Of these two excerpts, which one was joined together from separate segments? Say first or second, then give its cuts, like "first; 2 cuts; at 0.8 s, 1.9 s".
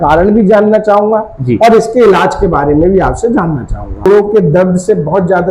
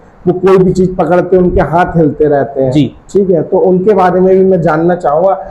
first; 1 cut; at 4.1 s